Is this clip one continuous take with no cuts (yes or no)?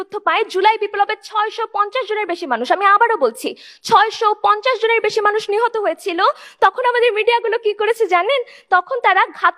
yes